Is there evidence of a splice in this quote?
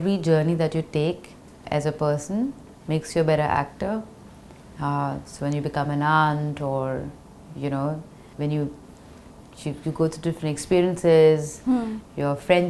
no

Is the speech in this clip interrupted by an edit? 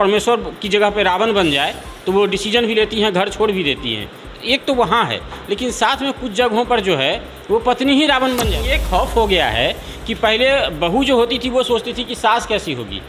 yes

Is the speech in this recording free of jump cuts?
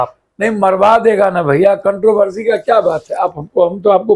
yes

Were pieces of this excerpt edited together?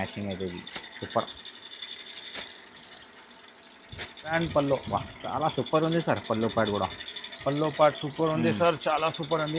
yes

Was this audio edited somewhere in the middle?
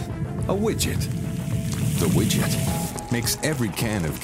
yes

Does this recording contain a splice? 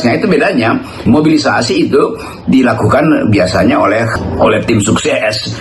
yes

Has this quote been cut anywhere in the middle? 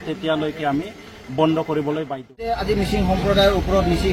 yes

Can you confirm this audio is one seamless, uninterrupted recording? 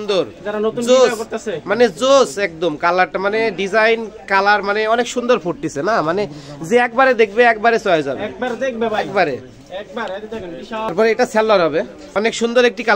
no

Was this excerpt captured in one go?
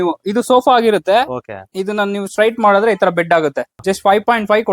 no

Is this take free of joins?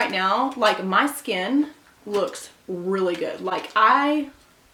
yes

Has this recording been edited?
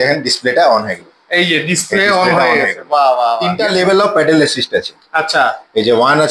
yes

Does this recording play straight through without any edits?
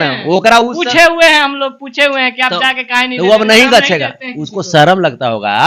yes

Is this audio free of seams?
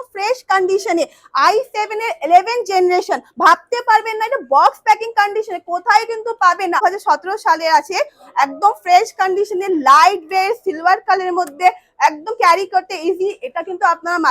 no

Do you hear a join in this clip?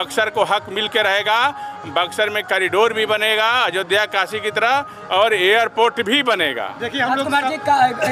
no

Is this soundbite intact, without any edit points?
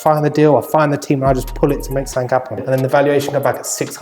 no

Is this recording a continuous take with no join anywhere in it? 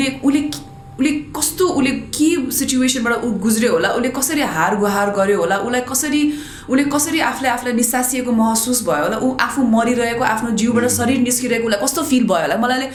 yes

